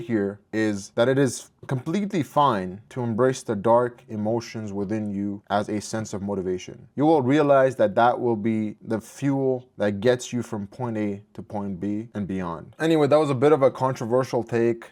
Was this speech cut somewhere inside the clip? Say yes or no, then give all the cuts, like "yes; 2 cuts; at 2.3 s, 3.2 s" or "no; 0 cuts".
no; 0 cuts